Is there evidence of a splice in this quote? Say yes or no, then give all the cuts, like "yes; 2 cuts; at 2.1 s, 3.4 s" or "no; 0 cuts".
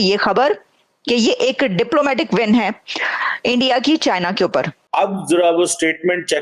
yes; 1 cut; at 4.8 s